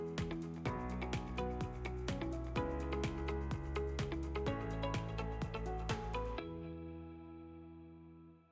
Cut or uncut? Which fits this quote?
uncut